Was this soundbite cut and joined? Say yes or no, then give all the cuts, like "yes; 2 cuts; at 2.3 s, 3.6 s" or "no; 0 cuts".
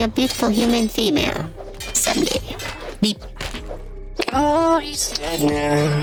no; 0 cuts